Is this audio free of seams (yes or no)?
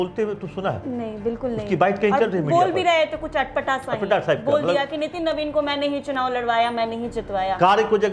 yes